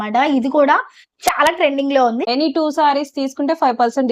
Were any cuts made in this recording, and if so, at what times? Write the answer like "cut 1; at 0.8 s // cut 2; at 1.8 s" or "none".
cut 1; at 2.2 s

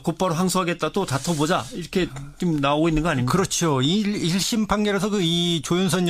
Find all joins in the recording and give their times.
none

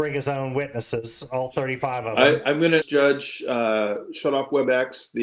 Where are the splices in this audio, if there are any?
cut 1; at 2.9 s

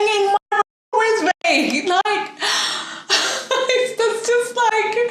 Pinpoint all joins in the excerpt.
none

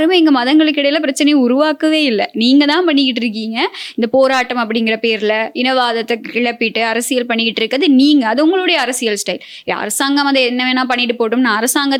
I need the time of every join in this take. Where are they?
none

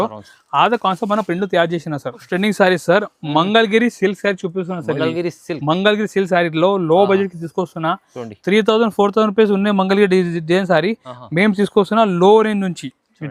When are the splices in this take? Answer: cut 1; at 2.3 s

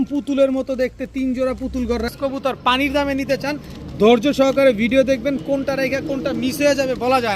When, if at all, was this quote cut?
cut 1; at 2.1 s

